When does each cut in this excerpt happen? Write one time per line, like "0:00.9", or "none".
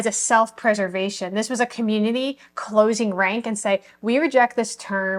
none